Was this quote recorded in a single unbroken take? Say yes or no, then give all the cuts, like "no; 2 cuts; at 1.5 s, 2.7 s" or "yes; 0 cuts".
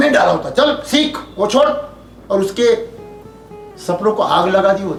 yes; 0 cuts